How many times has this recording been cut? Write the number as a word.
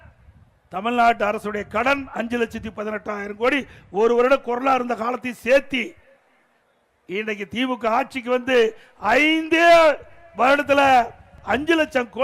one